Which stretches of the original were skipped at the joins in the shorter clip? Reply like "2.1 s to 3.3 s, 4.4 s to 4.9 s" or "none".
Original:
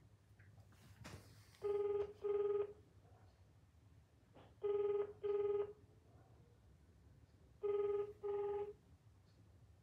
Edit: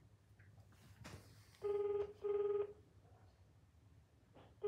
none